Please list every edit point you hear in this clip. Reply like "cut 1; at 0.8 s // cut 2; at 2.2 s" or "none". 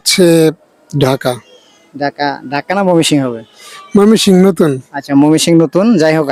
none